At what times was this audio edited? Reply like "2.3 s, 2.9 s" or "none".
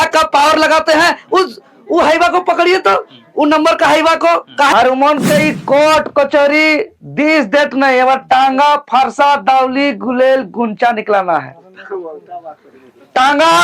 4.7 s